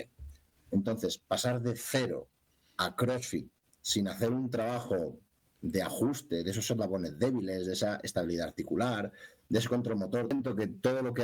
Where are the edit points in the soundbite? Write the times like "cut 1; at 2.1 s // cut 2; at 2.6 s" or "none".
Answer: cut 1; at 10.3 s